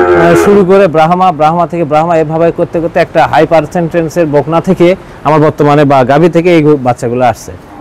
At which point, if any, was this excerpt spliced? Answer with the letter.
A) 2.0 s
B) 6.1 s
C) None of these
C